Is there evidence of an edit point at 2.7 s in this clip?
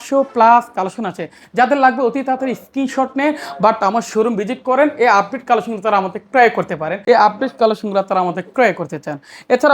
no; 1 cut; at 6.9 s

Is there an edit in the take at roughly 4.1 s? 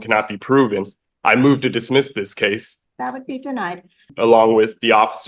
yes; 2 cuts; at 2.7 s, 4.1 s

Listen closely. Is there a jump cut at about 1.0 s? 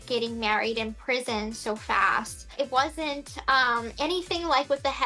no; 1 cut; at 2.5 s

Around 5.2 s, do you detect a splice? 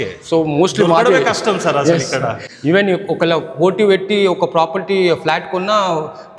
no; 1 cut; at 2.4 s

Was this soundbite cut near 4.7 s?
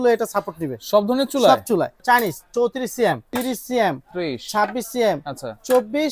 no; 2 cuts; at 2.0 s, 3.3 s

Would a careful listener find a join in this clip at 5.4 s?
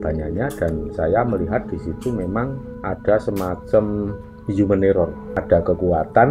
yes; 1 cut; at 5.4 s

